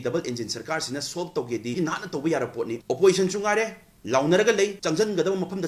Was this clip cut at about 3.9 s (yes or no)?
no